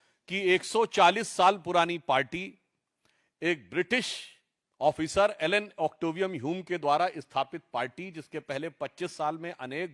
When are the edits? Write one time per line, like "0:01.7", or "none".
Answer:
none